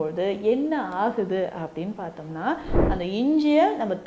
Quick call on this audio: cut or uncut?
cut